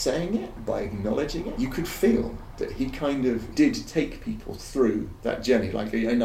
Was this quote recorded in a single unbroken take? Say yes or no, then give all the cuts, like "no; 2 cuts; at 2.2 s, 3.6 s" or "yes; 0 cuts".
no; 3 cuts; at 1.5 s, 3.5 s, 5.1 s